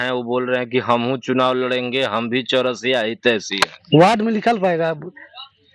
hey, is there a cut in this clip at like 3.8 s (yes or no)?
yes